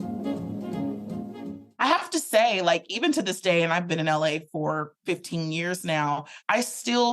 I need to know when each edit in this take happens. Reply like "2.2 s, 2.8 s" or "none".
1.6 s